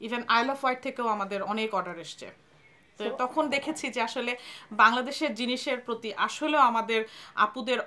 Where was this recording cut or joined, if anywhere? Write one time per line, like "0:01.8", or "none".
none